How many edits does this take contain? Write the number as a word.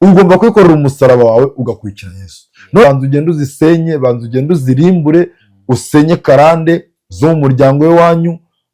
one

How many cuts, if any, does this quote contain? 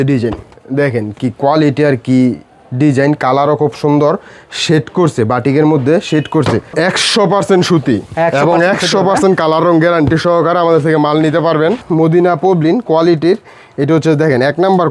two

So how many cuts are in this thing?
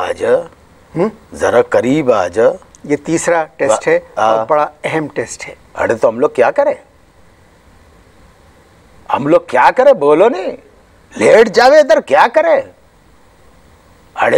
one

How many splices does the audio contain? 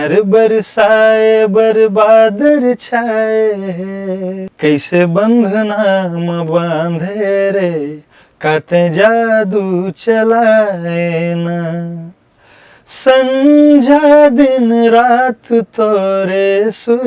one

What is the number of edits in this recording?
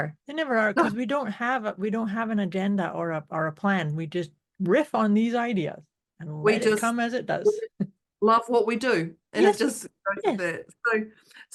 zero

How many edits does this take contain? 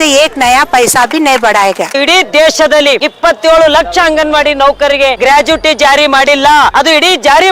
four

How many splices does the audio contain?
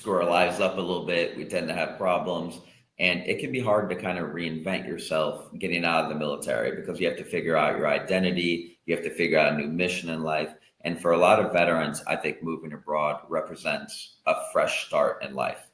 zero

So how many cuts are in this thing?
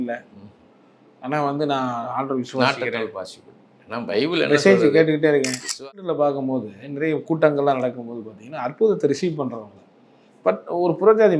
one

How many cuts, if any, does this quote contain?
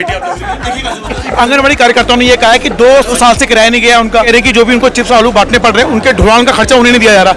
three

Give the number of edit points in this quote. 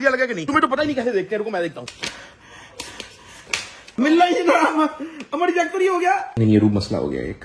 three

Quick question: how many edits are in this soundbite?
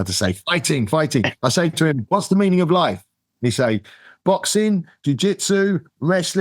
one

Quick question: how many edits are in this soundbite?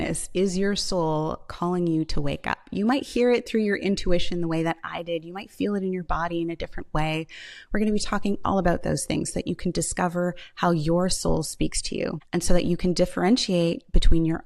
one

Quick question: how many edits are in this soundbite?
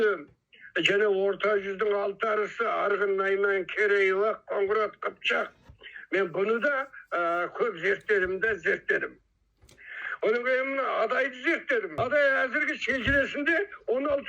one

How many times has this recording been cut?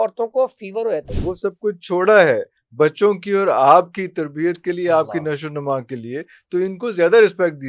one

